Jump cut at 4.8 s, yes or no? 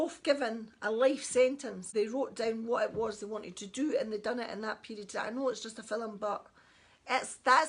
no